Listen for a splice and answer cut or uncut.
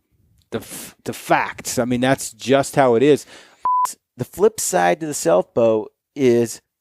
cut